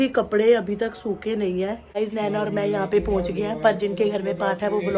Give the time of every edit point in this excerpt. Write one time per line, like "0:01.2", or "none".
0:02.0